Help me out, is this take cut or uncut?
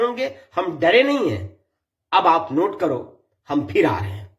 uncut